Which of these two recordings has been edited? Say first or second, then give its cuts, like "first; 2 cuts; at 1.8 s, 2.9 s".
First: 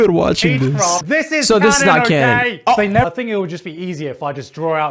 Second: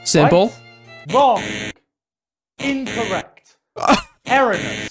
first; 2 cuts; at 1.0 s, 3.1 s